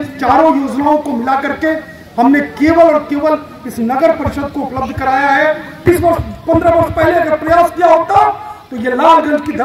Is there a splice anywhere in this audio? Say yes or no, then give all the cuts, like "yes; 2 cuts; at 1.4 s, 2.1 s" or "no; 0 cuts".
yes; 1 cut; at 5.9 s